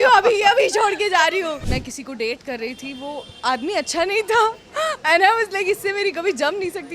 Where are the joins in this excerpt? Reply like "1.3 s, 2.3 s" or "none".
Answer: 1.6 s